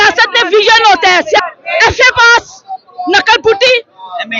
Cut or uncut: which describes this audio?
cut